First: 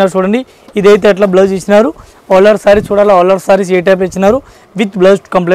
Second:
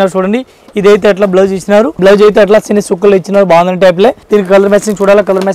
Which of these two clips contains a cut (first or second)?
second